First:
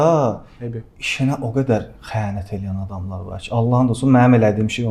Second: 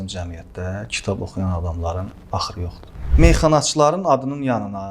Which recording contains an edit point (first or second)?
second